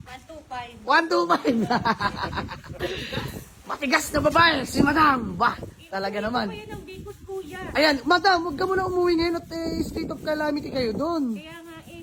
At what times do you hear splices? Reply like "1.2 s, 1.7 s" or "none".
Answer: none